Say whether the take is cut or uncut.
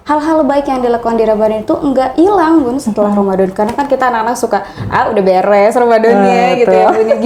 uncut